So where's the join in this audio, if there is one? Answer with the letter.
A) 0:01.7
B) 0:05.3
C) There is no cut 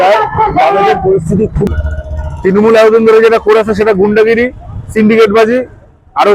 A